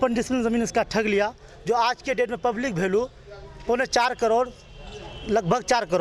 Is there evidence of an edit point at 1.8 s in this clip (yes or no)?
no